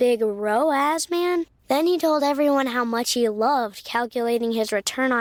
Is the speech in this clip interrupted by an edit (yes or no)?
no